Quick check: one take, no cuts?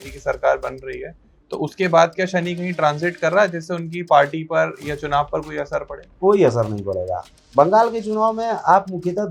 yes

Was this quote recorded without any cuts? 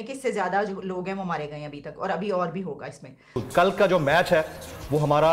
no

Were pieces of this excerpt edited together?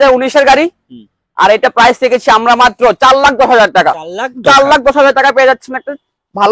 no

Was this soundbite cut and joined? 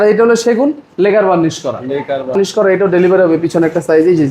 yes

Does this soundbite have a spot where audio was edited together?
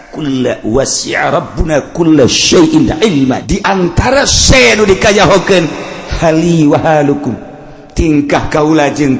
yes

